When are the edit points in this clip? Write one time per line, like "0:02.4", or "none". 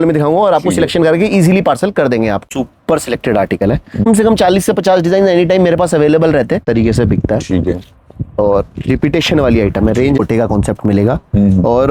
0:02.4
0:04.0
0:06.6
0:10.2